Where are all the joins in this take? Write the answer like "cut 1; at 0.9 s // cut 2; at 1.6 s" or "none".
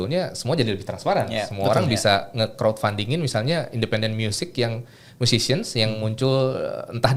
none